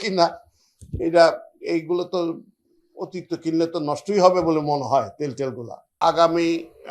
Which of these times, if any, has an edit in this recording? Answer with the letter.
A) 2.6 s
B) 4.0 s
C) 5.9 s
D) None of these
C